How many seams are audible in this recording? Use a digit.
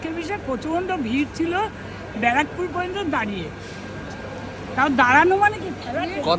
0